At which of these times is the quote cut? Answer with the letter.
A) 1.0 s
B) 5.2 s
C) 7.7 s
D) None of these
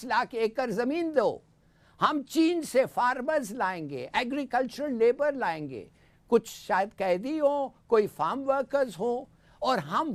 D